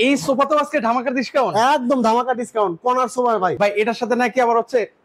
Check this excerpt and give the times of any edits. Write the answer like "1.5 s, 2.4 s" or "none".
3.5 s